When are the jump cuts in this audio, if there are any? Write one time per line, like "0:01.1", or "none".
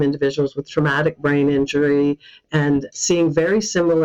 none